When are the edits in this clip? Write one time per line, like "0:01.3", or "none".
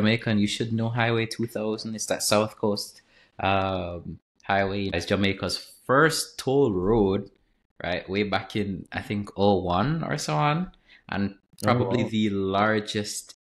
0:04.9

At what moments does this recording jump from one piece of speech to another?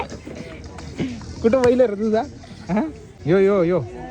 0:03.1

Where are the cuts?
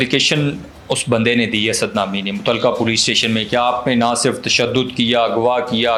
none

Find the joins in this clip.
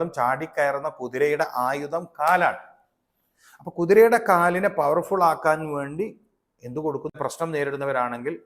0:07.1

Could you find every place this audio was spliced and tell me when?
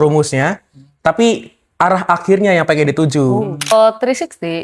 0:03.7

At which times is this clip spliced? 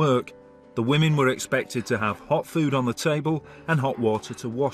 0:03.2

